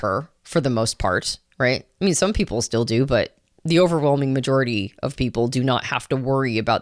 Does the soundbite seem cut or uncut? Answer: uncut